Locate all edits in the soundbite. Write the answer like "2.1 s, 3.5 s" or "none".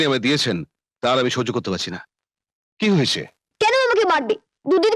3.5 s